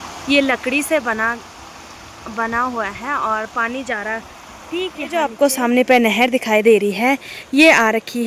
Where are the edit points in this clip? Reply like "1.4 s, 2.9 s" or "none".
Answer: 5.3 s

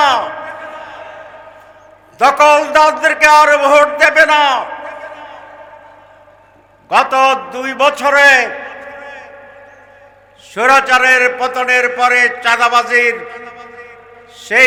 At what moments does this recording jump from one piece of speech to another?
none

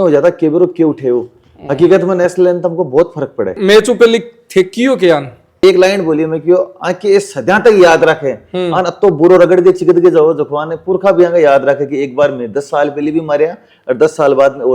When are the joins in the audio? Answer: 3.5 s, 5.5 s

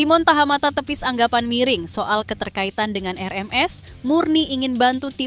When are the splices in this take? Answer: none

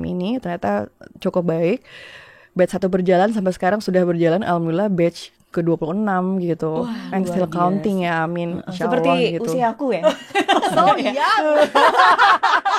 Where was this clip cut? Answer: 10.6 s

